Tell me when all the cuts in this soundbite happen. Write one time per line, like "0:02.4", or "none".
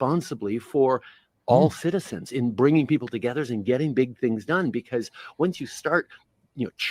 0:02.6